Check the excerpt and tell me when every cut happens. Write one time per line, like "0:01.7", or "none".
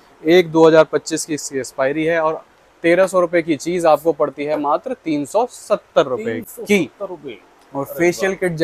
none